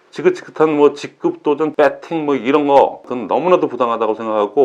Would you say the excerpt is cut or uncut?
cut